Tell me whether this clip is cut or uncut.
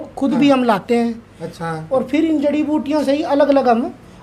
cut